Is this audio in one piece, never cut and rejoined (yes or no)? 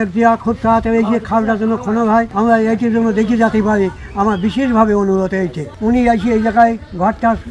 yes